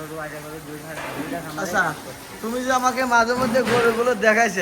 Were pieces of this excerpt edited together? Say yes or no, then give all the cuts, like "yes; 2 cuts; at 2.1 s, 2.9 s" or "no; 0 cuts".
no; 0 cuts